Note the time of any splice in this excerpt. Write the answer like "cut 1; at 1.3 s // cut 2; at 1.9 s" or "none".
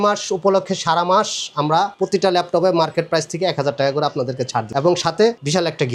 none